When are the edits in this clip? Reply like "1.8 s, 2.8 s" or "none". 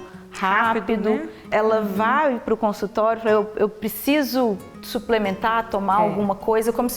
1.5 s